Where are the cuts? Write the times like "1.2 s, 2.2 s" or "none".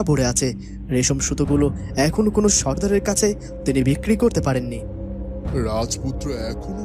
none